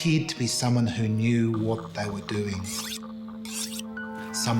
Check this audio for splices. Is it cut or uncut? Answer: uncut